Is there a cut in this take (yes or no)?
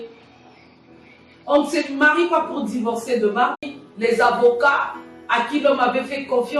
yes